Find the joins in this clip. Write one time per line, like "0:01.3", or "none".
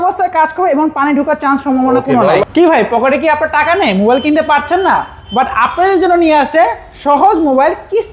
0:02.4